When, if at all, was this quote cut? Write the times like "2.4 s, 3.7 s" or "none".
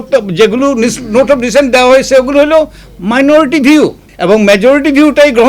4.1 s